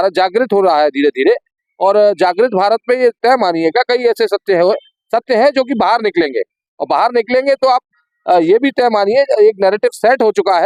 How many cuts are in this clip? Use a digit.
0